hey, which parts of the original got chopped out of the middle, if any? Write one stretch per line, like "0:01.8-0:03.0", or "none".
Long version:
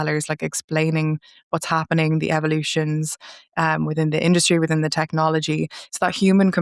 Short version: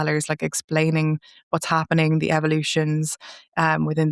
none